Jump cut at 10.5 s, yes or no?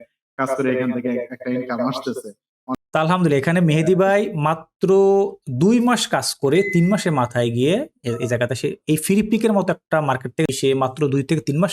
yes